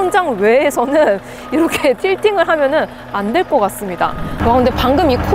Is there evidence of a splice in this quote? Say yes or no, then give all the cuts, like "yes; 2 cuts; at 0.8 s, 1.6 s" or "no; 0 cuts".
yes; 1 cut; at 4.3 s